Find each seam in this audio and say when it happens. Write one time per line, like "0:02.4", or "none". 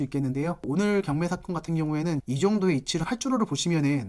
0:03.0

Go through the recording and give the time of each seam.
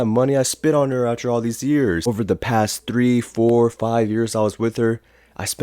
0:02.1

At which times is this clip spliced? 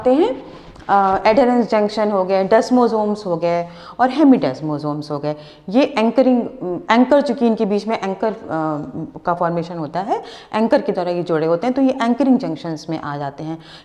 none

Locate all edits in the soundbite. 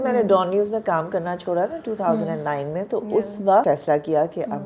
0:03.6

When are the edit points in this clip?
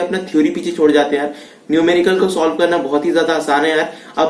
none

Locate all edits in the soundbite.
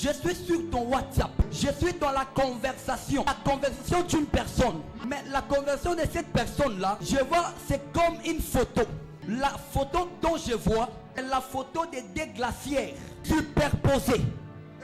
0:01.5
0:03.3
0:04.9
0:07.0
0:09.1
0:11.2
0:13.1

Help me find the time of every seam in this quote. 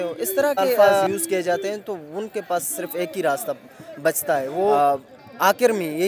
0:01.1
0:04.8

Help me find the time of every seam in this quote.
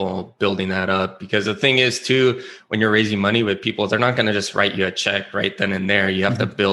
none

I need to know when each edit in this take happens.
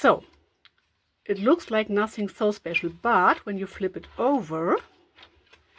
none

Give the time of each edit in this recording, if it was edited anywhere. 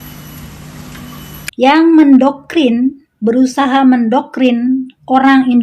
0:00.9

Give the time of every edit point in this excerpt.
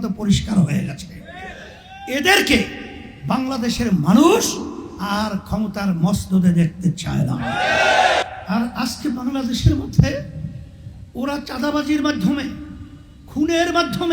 0:08.3

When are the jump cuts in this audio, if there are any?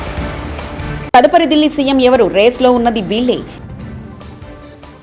0:01.1
0:03.8

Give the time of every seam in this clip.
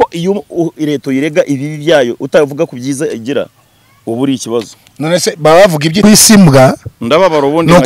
0:06.0

